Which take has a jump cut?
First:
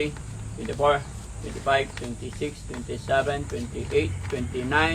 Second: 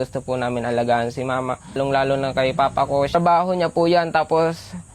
second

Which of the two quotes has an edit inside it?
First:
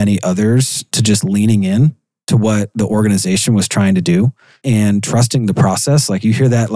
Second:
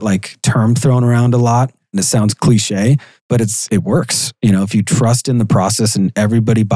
second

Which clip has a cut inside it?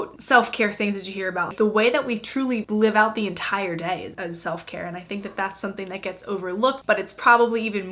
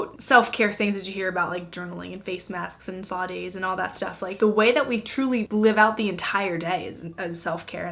first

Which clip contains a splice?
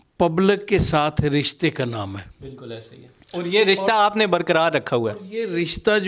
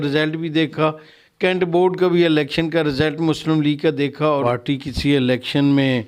second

